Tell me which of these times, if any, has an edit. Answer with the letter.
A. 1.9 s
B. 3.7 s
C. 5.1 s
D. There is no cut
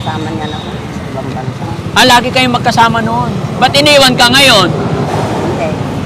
C